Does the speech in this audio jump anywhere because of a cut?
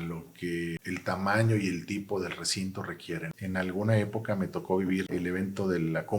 yes; 3 cuts; at 0.8 s, 3.3 s, 5.1 s

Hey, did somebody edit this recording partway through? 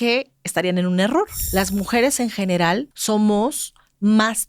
yes; 2 cuts; at 1.4 s, 2.9 s

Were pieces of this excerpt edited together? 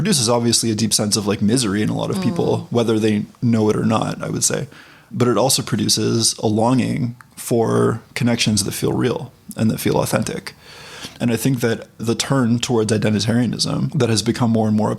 no; 0 cuts

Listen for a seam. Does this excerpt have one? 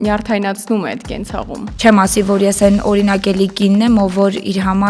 yes; 1 cut; at 1.7 s

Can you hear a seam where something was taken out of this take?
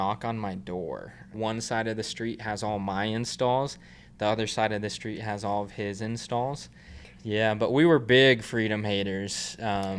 yes; 2 cuts; at 1.3 s, 7.0 s

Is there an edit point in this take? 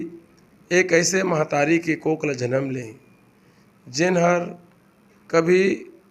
no; 0 cuts

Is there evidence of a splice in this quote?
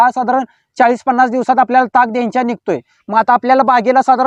no; 0 cuts

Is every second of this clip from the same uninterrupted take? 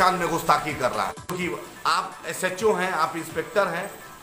no; 1 cut; at 1.3 s

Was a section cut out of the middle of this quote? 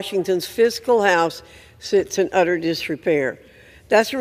yes; 1 cut; at 2.8 s

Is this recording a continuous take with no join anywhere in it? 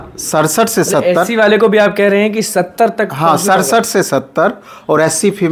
yes; 0 cuts

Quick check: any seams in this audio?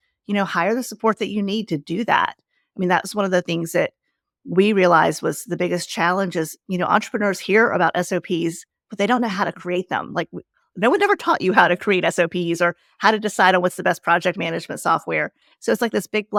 no; 0 cuts

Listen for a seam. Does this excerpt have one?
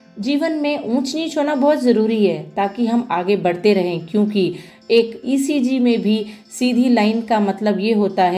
no; 0 cuts

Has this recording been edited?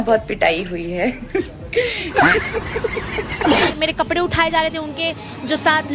yes; 2 cuts; at 2.1 s, 3.8 s

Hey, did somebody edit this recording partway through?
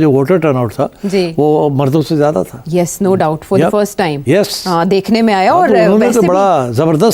no; 0 cuts

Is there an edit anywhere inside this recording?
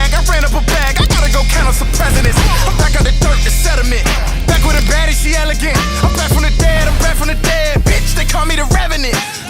no; 0 cuts

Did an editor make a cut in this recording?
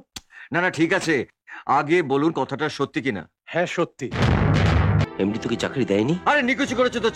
yes; 1 cut; at 5.0 s

